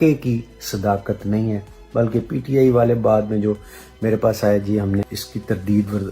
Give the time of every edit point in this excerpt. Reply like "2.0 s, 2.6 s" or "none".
5.2 s